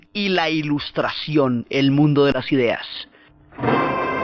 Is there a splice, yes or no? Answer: no